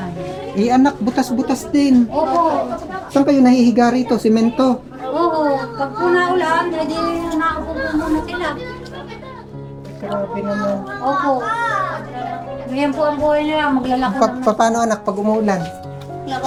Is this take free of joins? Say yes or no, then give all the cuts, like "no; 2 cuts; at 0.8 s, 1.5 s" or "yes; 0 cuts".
yes; 0 cuts